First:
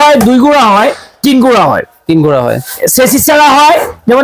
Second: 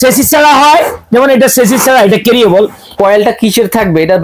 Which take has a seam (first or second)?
second